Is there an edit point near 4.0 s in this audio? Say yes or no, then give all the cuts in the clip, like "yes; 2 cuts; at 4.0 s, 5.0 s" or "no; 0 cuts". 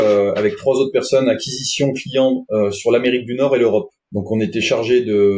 yes; 1 cut; at 4.0 s